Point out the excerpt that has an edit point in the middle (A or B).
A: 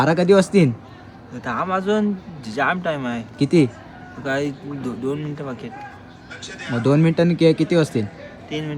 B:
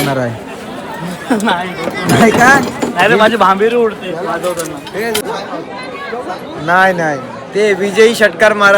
B